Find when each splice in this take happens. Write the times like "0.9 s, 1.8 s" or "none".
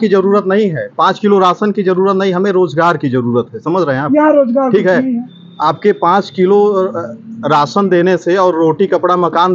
none